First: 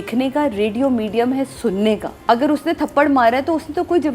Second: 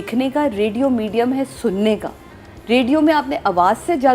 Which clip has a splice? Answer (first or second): first